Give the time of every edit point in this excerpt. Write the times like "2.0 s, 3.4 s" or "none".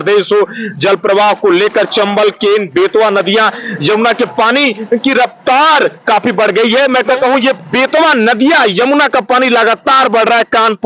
7.2 s